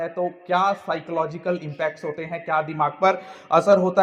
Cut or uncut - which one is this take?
uncut